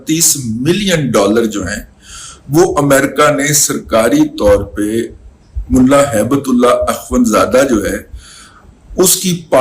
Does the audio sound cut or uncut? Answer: uncut